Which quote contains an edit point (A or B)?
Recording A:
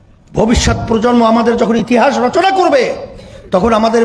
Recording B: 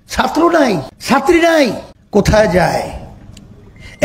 B